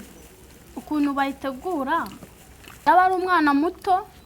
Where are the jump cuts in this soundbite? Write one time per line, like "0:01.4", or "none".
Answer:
0:02.9